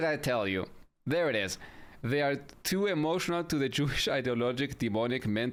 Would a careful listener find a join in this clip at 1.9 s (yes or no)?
no